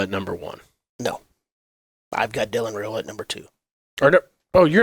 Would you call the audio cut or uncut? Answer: uncut